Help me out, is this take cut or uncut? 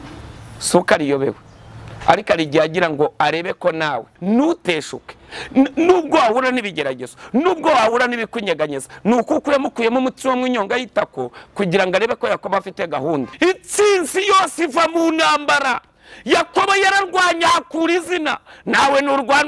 cut